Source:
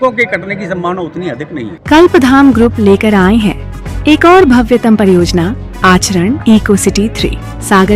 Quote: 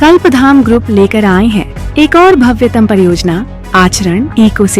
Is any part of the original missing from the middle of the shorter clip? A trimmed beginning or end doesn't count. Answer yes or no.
yes